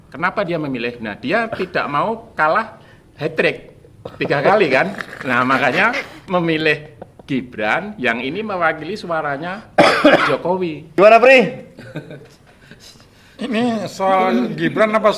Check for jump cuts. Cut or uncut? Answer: cut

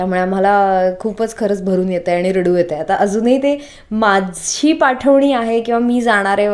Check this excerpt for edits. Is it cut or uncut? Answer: uncut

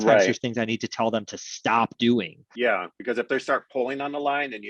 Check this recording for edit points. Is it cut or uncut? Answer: cut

